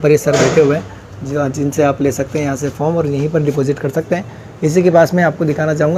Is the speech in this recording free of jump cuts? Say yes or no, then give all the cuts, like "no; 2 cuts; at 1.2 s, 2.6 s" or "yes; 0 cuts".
yes; 0 cuts